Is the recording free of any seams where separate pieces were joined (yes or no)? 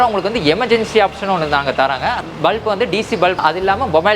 no